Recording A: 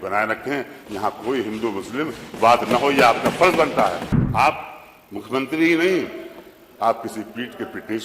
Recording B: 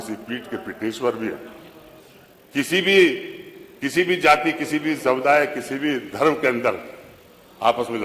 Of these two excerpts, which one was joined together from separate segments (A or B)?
A